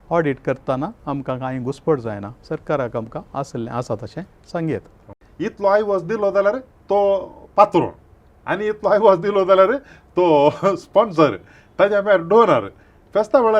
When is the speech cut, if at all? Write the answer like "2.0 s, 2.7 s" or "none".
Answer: 5.2 s